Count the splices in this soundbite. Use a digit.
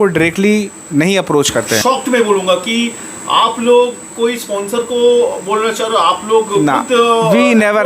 1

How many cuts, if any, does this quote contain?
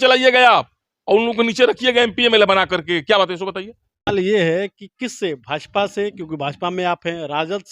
1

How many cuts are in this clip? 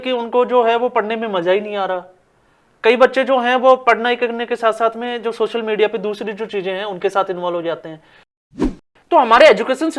1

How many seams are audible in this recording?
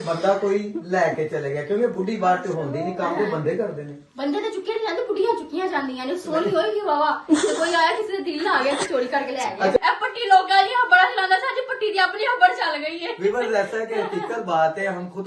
2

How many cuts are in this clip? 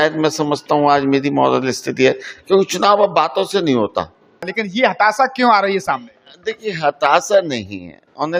1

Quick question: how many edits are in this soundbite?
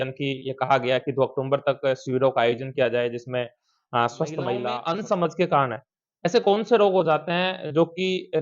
1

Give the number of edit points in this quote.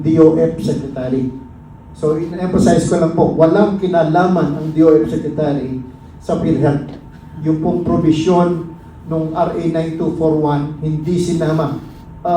0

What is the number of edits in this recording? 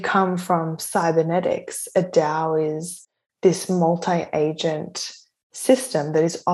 0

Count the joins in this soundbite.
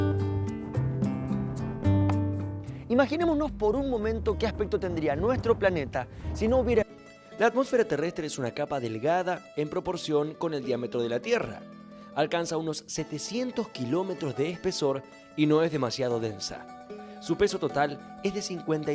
0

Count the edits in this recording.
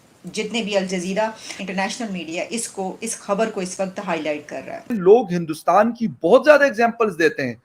2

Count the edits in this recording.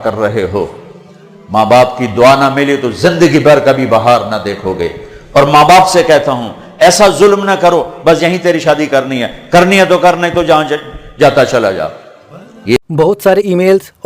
1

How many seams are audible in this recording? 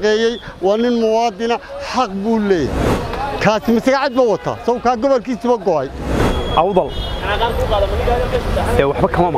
1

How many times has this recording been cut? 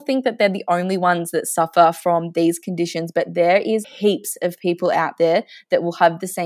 1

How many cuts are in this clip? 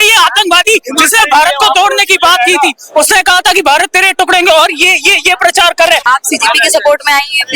1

